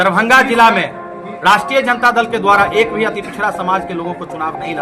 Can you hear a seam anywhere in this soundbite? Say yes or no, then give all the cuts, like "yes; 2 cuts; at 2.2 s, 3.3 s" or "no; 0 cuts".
no; 0 cuts